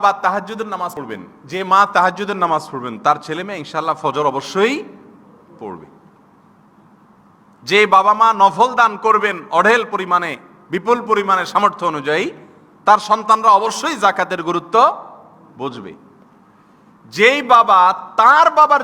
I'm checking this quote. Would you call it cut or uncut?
cut